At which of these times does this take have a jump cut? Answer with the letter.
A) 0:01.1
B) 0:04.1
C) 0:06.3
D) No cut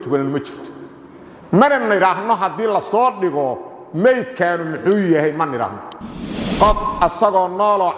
C